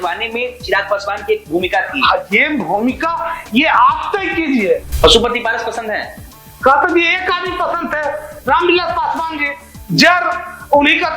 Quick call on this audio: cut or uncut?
cut